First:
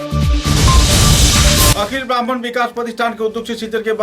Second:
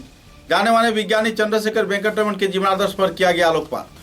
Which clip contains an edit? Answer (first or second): first